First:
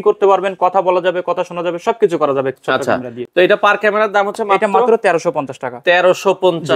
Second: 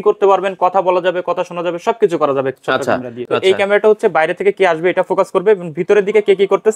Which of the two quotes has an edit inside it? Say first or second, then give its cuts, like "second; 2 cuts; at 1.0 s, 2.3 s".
second; 1 cut; at 3.2 s